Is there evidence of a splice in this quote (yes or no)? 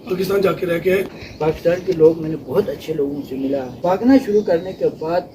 yes